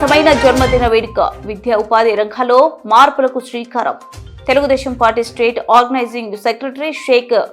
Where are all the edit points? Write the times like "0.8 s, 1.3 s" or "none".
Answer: none